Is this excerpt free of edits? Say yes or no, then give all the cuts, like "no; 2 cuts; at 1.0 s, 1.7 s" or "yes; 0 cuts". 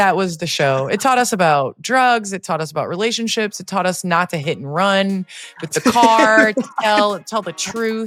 yes; 0 cuts